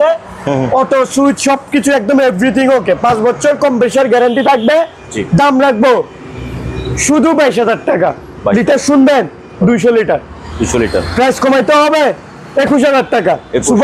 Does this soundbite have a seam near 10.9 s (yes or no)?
no